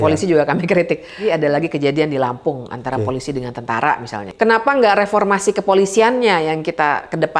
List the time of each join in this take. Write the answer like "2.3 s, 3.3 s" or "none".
1.2 s, 4.3 s